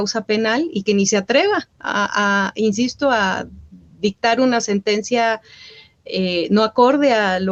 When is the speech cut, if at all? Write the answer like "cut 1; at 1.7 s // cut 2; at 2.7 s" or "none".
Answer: none